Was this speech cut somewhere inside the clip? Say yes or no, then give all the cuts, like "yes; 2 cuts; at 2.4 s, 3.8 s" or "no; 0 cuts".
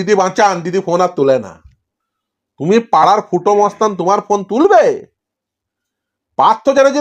yes; 1 cut; at 3.0 s